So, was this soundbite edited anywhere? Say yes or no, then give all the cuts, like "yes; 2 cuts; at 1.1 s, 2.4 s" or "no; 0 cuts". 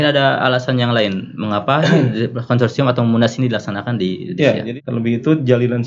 yes; 1 cut; at 4.7 s